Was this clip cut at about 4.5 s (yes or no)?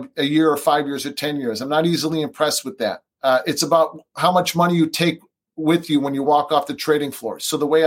no